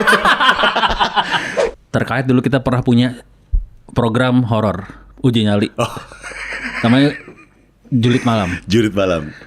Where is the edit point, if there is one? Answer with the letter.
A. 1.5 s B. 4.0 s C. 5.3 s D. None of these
A